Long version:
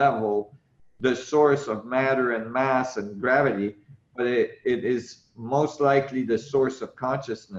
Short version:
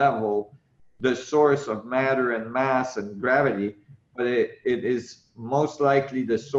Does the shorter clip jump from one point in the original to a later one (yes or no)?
no